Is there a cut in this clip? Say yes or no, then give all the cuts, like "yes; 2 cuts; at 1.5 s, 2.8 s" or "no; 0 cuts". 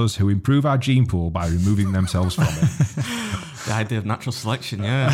no; 0 cuts